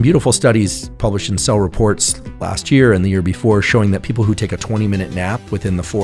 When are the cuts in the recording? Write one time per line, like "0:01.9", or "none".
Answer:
none